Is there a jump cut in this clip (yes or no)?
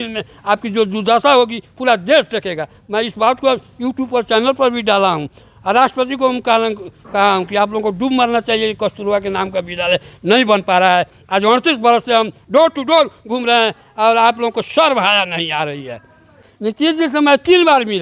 yes